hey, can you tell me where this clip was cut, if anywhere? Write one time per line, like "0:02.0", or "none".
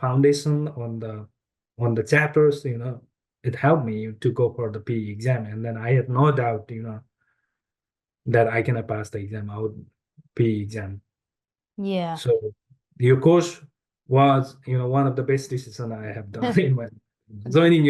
none